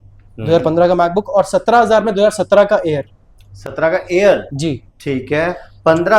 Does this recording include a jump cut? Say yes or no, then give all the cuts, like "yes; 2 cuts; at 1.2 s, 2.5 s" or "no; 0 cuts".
no; 0 cuts